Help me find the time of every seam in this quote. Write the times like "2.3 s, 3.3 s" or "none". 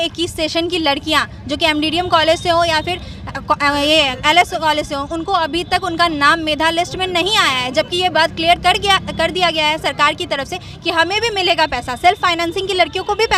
none